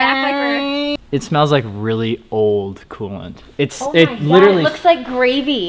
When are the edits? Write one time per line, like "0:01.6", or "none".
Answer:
0:01.0